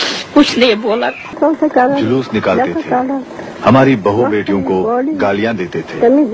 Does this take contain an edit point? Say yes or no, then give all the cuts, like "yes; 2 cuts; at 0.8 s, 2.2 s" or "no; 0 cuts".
yes; 1 cut; at 1.4 s